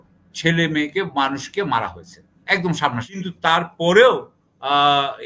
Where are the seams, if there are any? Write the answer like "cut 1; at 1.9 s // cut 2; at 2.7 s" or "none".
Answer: cut 1; at 3.2 s